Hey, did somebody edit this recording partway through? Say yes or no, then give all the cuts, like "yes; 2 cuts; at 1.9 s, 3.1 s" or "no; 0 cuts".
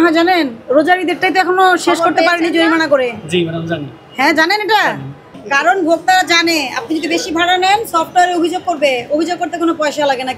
no; 0 cuts